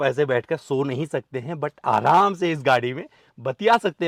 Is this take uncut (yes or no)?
yes